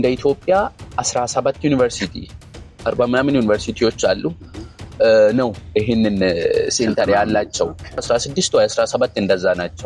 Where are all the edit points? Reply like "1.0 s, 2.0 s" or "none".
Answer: 8.0 s